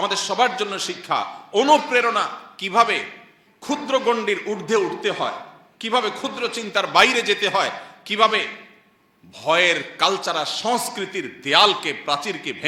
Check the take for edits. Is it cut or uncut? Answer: uncut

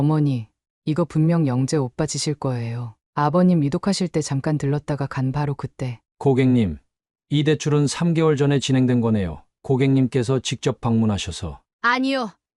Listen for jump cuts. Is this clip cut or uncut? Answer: cut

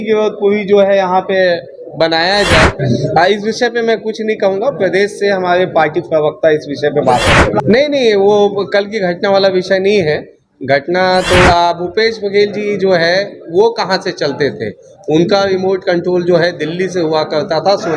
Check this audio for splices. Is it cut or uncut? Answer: cut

